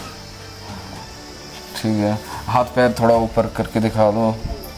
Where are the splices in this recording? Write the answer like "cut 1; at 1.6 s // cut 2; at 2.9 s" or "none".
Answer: none

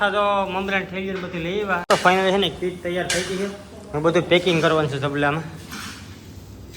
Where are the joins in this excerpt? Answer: cut 1; at 1.8 s

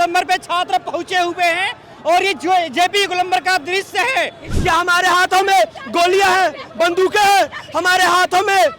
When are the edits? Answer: cut 1; at 4.5 s

